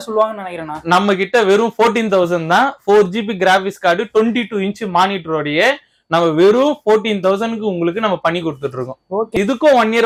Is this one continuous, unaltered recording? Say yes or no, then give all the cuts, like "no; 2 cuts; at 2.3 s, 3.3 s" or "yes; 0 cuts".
yes; 0 cuts